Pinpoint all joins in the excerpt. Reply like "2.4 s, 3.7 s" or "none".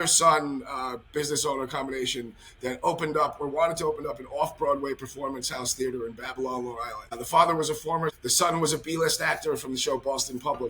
7.0 s, 8.2 s